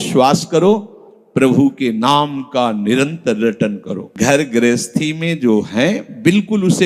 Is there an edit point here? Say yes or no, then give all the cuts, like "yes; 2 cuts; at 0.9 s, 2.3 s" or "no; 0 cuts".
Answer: yes; 1 cut; at 4.0 s